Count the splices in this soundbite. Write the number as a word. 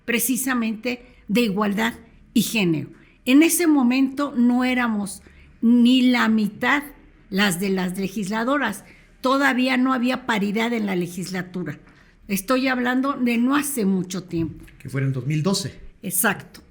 zero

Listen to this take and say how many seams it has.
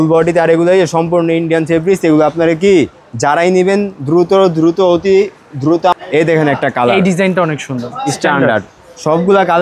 one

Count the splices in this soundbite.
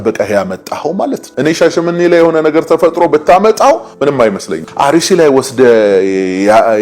one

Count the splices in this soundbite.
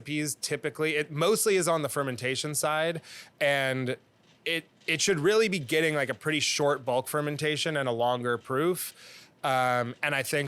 zero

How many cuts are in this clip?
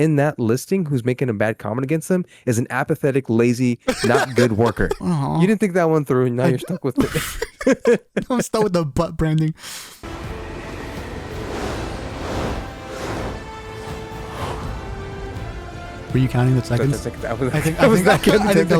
two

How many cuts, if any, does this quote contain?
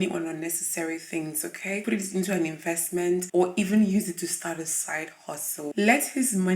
one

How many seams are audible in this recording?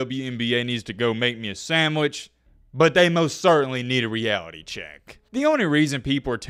zero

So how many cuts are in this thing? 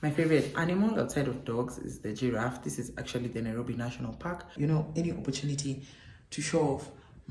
one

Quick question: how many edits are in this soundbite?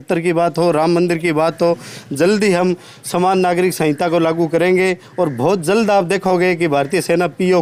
zero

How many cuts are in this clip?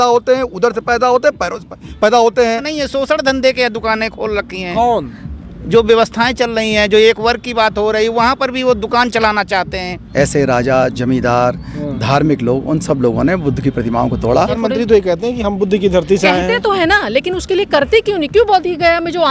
three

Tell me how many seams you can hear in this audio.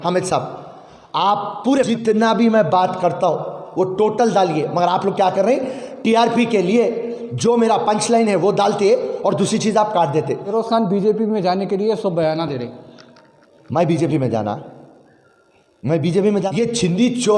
three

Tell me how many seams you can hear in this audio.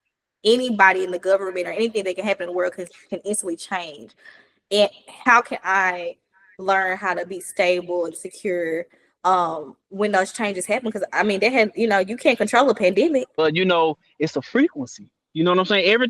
one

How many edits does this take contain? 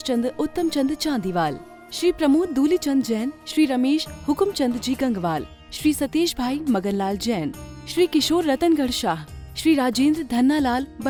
zero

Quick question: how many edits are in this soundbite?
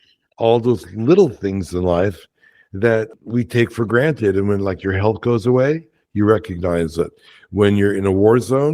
one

